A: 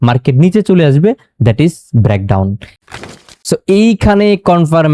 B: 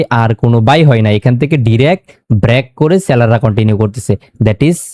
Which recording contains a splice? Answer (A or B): A